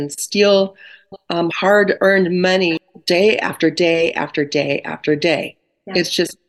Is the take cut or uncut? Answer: uncut